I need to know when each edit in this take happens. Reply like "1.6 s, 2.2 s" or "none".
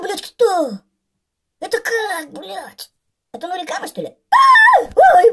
none